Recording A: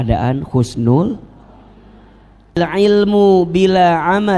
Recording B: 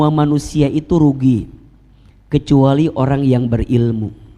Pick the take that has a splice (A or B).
A